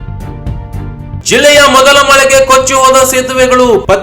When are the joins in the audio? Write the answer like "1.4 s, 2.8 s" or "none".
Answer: 1.2 s